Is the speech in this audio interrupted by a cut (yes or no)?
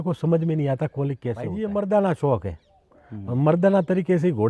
yes